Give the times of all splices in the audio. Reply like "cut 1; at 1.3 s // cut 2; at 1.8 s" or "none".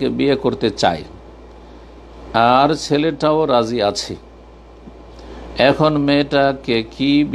none